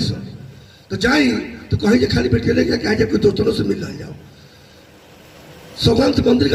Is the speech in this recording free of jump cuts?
yes; 0 cuts

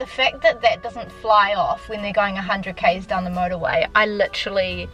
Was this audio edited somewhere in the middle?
no; 0 cuts

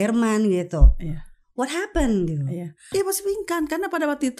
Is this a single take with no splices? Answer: no; 1 cut; at 2.9 s

